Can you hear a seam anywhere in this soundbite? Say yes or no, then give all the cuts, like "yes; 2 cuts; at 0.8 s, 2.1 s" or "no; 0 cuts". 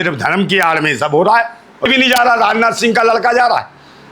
yes; 1 cut; at 1.9 s